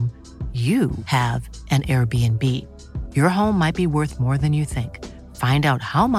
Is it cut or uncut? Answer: uncut